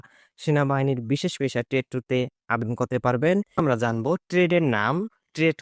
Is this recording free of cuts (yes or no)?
no